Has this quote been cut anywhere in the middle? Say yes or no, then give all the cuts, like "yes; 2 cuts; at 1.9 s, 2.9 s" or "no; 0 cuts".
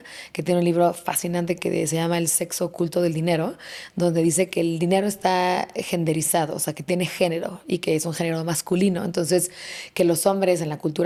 no; 0 cuts